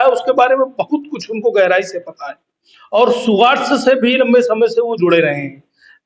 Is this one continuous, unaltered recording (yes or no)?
yes